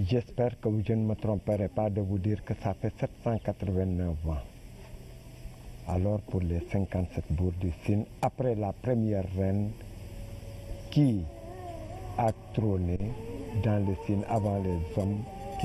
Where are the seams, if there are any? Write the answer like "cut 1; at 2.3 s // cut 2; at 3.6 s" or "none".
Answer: cut 1; at 2.0 s